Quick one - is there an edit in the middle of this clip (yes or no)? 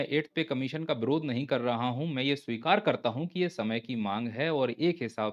no